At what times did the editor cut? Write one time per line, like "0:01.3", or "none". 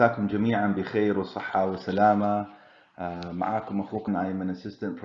0:04.1